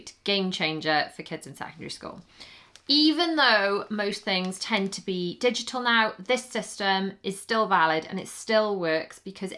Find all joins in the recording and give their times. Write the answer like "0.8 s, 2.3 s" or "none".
none

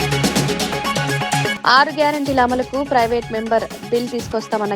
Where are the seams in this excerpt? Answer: 1.6 s

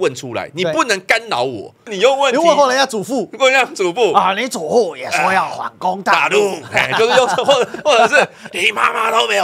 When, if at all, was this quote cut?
1.9 s

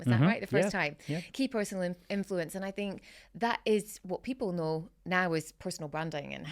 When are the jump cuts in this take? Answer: none

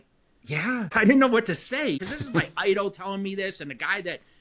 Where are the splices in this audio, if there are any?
0.9 s, 2.0 s

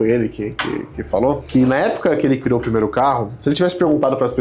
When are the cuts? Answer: 3.3 s

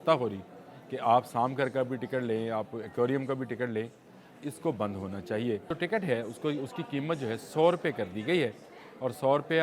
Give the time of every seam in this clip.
5.7 s

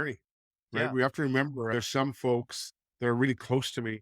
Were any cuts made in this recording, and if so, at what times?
1.7 s

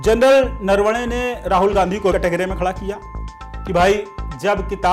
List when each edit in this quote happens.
2.1 s

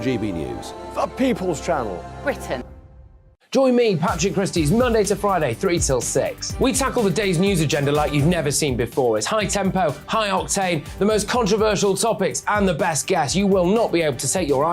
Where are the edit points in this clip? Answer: 2.7 s

